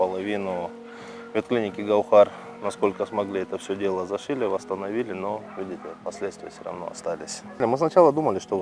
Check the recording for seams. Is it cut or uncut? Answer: uncut